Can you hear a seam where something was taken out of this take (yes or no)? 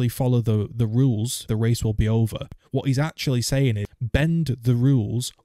yes